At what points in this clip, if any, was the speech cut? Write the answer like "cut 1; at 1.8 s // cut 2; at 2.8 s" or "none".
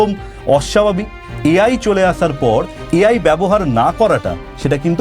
cut 1; at 2.8 s